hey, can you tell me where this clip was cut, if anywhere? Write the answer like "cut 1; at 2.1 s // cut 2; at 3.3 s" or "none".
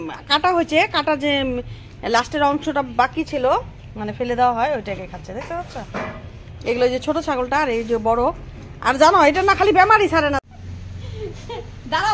cut 1; at 10.4 s